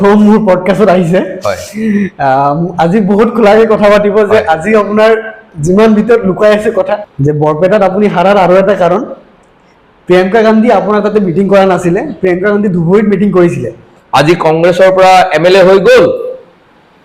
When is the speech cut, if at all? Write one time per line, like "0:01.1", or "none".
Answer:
0:07.1
0:13.9

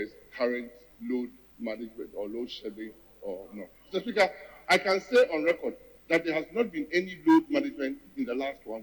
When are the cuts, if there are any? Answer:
0:01.2
0:04.5

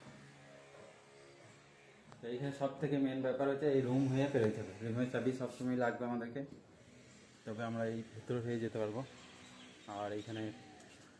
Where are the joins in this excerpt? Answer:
none

